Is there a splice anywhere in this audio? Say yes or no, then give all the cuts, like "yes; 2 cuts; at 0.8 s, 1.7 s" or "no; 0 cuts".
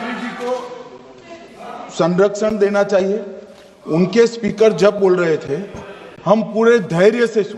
no; 0 cuts